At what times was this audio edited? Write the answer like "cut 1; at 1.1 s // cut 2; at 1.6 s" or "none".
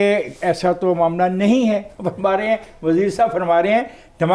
cut 1; at 2.0 s